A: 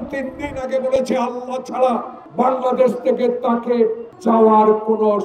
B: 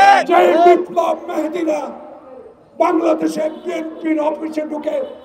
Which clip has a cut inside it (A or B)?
A